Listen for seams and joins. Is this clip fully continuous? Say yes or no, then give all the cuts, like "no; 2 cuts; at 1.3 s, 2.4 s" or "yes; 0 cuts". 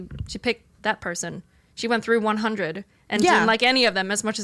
no; 1 cut; at 1.6 s